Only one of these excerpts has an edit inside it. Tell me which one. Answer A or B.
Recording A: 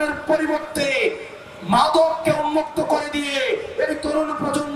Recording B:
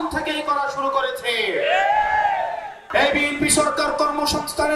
B